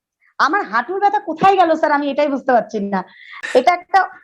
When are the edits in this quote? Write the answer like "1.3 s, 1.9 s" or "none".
3.3 s